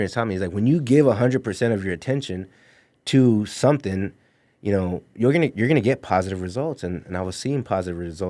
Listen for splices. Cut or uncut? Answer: uncut